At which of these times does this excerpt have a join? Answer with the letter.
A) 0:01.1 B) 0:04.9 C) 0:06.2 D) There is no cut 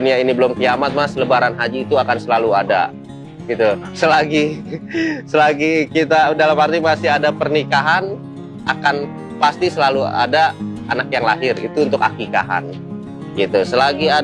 D